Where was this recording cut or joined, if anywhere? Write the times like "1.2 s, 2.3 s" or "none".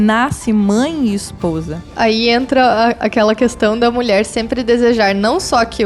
1.9 s